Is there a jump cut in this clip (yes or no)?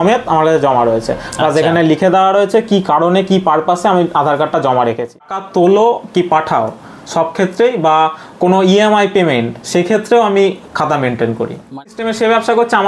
yes